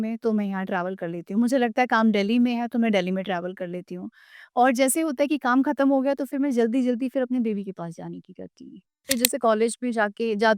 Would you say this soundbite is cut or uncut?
cut